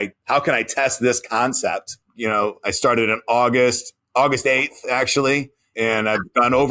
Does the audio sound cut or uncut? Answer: cut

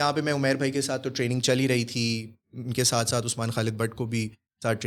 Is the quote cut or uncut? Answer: uncut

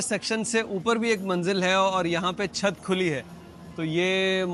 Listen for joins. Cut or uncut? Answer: uncut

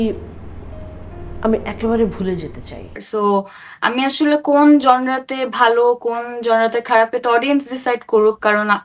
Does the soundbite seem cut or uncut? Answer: cut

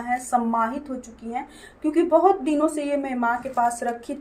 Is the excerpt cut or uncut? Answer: uncut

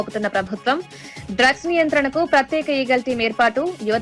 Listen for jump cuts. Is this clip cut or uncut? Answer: uncut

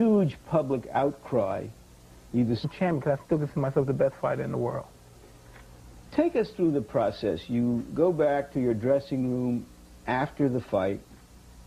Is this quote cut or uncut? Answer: uncut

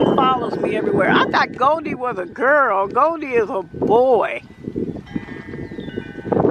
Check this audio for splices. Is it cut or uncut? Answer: uncut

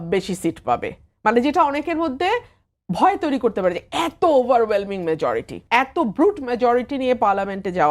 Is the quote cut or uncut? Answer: cut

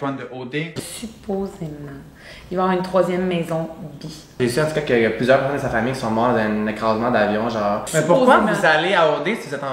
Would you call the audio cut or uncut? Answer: cut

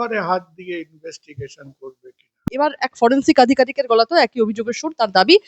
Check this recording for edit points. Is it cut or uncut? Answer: cut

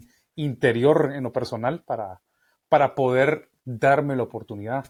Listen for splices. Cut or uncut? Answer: uncut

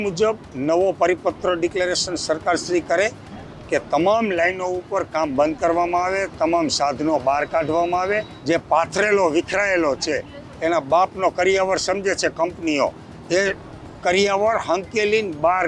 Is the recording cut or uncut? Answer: cut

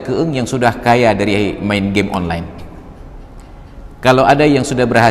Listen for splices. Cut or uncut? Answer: uncut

